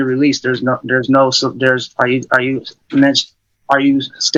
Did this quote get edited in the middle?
no; 0 cuts

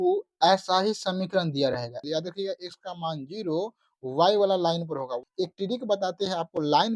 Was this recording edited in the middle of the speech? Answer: yes; 2 cuts; at 2.0 s, 5.2 s

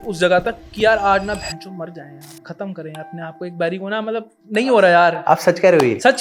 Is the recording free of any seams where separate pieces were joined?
yes; 0 cuts

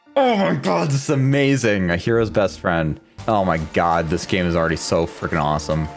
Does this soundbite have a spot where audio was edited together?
yes; 1 cut; at 3.1 s

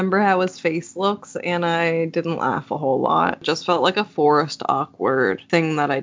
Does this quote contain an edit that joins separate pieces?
yes; 1 cut; at 3.4 s

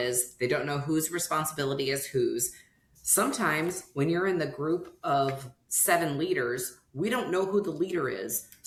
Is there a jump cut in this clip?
no; 0 cuts

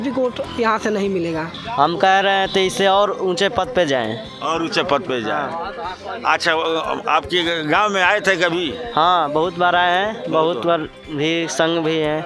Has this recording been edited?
yes; 1 cut; at 1.6 s

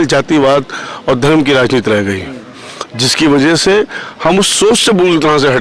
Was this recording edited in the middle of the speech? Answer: no; 0 cuts

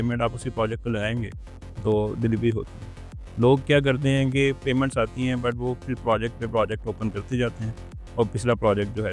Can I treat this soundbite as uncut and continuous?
yes; 0 cuts

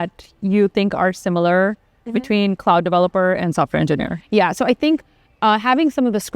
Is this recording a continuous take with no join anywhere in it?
yes; 0 cuts

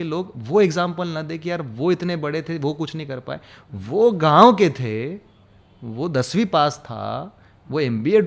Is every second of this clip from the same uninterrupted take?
yes; 0 cuts

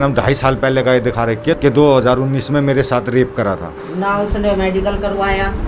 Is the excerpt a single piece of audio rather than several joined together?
no; 2 cuts; at 1.6 s, 3.8 s

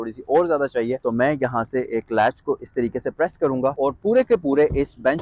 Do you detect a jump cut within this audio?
yes; 2 cuts; at 1.0 s, 3.8 s

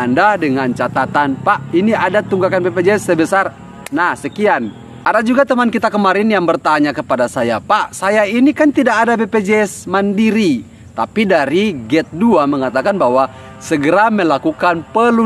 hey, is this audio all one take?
no; 1 cut; at 4.8 s

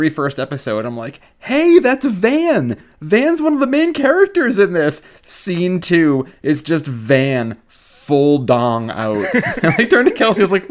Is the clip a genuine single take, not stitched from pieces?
yes; 0 cuts

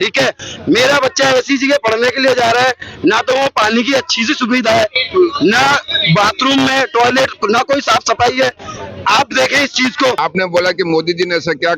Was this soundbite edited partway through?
yes; 1 cut; at 10.2 s

